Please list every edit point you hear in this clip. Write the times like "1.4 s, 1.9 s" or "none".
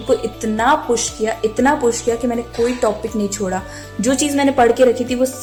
none